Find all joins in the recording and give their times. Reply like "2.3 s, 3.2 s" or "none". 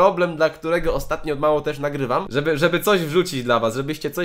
2.2 s